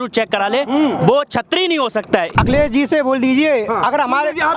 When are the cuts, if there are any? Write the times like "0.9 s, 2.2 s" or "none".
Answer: 2.3 s